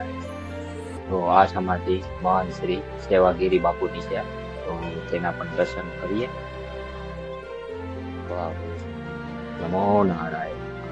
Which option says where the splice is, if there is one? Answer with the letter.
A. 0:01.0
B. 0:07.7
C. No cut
A